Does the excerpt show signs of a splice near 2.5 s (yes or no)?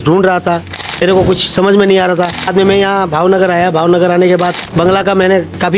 yes